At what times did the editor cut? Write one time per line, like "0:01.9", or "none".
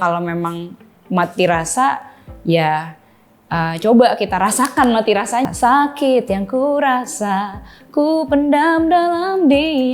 0:05.4